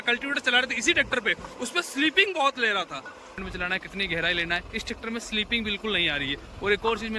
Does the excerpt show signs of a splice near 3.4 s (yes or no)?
yes